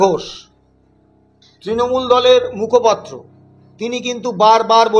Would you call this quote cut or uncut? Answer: uncut